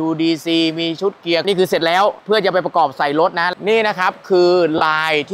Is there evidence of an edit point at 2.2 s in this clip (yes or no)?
yes